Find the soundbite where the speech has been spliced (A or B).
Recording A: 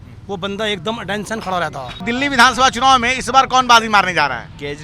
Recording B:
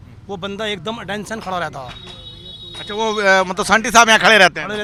A